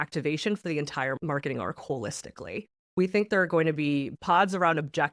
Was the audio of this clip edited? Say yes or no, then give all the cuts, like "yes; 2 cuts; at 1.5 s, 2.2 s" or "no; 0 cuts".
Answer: yes; 3 cuts; at 1.2 s, 2.7 s, 4.1 s